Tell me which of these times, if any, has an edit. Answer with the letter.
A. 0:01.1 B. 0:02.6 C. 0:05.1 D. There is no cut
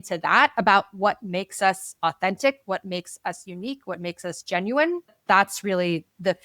C